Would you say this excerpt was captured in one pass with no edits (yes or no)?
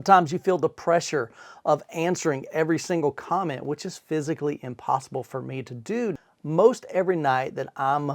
no